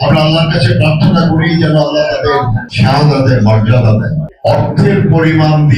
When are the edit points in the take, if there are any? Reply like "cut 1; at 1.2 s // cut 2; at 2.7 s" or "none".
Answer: cut 1; at 4.3 s